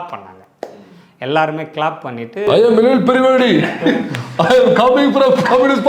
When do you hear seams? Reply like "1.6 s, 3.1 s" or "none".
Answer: none